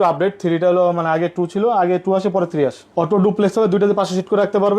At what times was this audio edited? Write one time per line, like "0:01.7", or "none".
0:02.8